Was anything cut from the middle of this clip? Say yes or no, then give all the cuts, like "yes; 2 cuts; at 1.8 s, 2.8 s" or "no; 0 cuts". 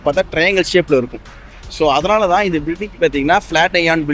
no; 0 cuts